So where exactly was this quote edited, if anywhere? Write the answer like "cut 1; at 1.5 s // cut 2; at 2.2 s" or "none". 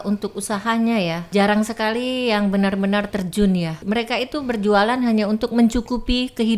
cut 1; at 1.3 s // cut 2; at 3.8 s